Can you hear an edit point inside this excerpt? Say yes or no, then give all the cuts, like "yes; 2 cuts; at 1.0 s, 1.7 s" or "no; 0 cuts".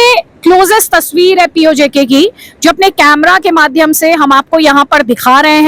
no; 0 cuts